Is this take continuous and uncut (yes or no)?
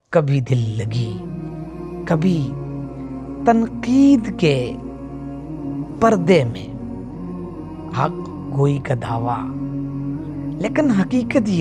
yes